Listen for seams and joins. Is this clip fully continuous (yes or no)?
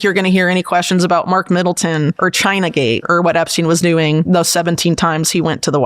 no